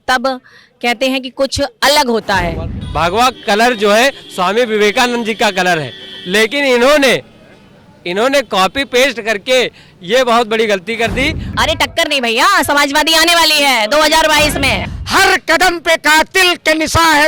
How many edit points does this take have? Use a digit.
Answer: 3